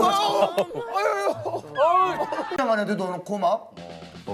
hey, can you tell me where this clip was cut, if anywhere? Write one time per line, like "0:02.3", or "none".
0:02.5